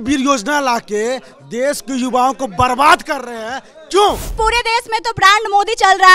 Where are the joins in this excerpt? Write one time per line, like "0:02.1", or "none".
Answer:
0:04.3